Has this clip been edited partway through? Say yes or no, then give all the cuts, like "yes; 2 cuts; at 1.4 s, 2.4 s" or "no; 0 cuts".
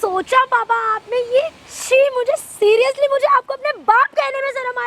no; 0 cuts